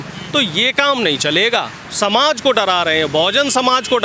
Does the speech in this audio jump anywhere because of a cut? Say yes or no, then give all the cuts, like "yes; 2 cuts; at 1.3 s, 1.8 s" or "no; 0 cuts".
yes; 1 cut; at 1.8 s